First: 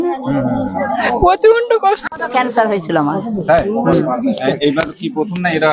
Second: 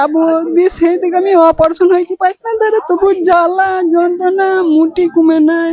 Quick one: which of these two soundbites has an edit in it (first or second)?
first